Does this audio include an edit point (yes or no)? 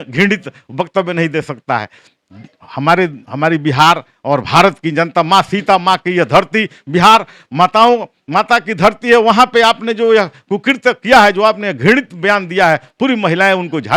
no